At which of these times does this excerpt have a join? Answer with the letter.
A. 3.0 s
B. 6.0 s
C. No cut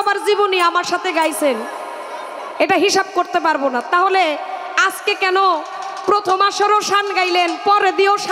C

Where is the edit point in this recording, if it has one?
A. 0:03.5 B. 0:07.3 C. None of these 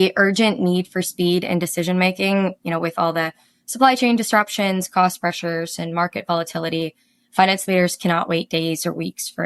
C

